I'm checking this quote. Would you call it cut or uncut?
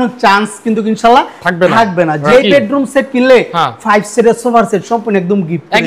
cut